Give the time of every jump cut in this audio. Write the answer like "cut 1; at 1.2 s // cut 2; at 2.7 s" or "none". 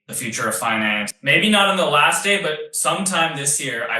cut 1; at 1.1 s

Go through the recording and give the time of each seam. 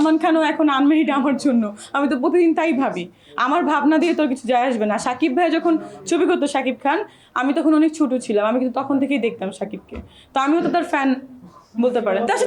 none

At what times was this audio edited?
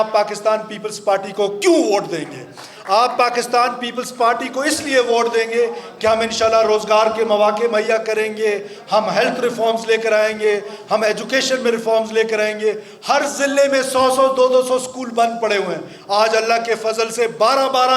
none

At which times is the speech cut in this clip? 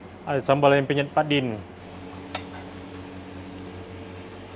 cut 1; at 1.7 s

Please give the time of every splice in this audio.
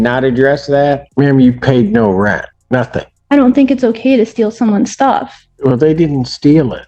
cut 1; at 1.1 s // cut 2; at 2.8 s // cut 3; at 5.4 s

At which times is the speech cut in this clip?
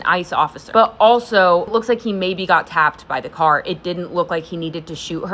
cut 1; at 1.7 s

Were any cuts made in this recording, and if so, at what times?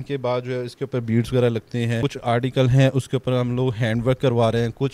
none

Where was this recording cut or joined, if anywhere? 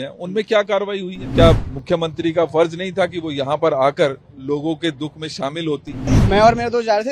cut 1; at 1.2 s // cut 2; at 6.1 s

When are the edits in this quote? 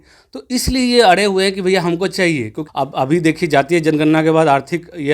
cut 1; at 2.6 s

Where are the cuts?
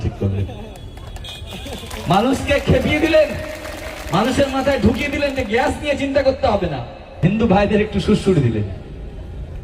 cut 1; at 7.0 s

